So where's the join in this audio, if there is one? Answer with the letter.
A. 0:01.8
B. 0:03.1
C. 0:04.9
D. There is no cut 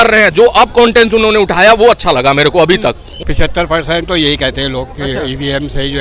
B